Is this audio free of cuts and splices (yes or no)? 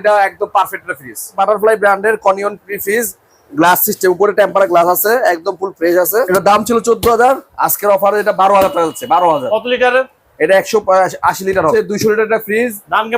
no